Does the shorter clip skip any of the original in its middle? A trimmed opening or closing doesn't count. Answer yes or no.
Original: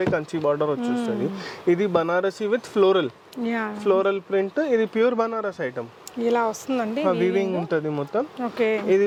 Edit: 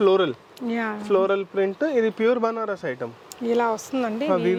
no